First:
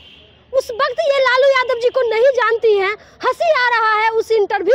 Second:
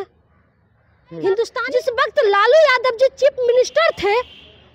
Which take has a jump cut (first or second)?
second